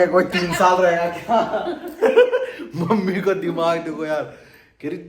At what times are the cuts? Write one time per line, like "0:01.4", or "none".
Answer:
none